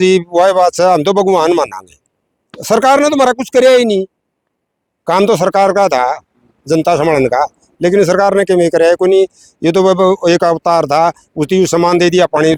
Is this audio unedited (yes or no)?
yes